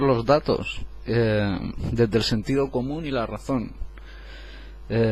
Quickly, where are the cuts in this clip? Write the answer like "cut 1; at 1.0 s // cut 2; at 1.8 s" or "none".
none